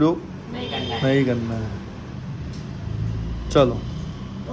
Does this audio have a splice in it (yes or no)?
no